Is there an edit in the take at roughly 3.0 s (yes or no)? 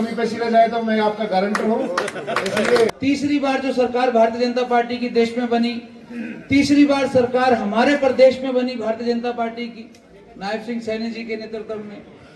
yes